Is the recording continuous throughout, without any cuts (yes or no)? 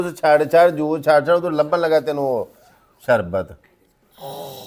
yes